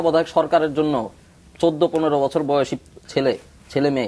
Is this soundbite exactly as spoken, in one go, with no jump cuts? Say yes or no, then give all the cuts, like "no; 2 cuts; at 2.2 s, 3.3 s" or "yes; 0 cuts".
yes; 0 cuts